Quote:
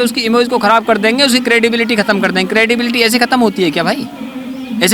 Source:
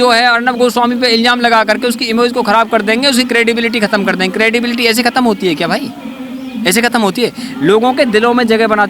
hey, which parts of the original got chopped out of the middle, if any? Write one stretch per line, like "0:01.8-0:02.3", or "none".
none

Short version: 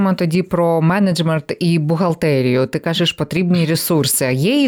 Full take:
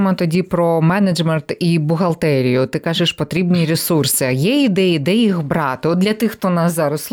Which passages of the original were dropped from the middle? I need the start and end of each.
none

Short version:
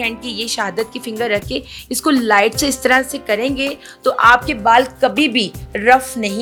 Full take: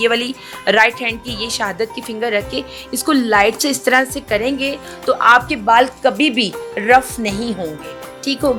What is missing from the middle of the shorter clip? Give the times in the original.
none

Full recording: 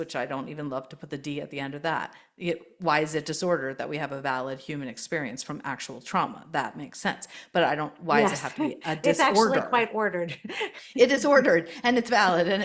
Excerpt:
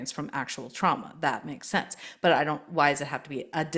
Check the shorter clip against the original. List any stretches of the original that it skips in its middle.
none

